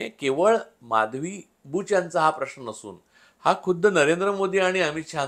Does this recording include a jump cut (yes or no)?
no